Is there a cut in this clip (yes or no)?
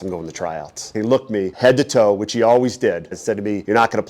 yes